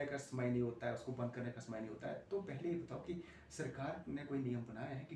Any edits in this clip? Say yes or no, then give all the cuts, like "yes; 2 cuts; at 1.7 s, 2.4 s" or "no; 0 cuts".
no; 0 cuts